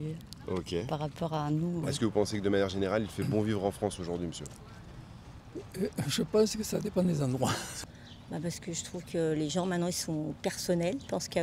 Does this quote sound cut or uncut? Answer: cut